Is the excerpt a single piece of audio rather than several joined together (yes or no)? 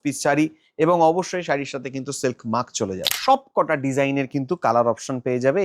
no